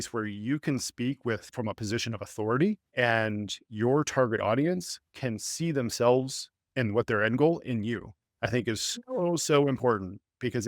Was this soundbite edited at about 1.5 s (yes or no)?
yes